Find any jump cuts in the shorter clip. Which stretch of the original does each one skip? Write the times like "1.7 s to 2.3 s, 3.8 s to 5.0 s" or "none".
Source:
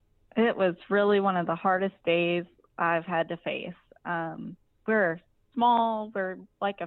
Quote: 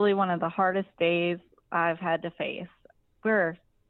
3.9 s to 4.5 s